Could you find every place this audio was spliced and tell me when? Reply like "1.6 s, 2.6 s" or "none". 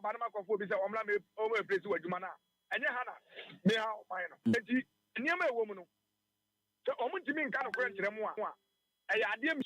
4.5 s

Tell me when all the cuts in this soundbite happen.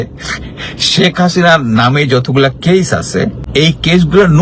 3.4 s

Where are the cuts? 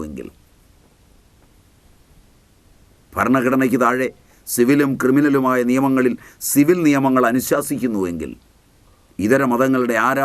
8.9 s

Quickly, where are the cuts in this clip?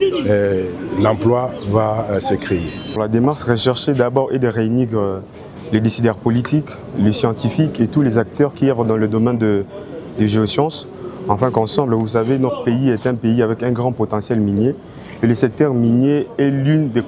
3.0 s

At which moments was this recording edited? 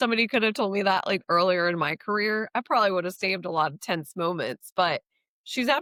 none

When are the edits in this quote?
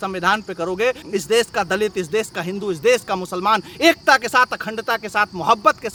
none

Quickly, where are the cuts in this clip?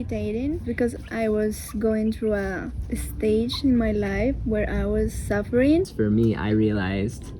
0.9 s, 5.9 s

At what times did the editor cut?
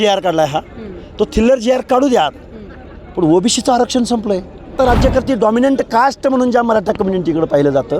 4.7 s

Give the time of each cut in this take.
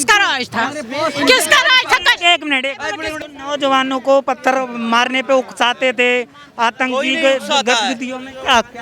3.2 s

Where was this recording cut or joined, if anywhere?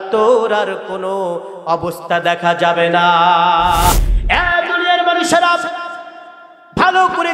4.0 s

